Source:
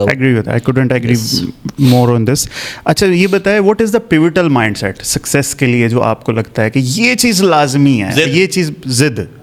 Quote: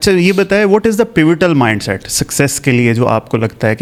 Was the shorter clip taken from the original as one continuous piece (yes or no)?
yes